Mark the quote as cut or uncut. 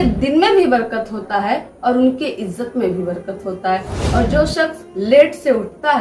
uncut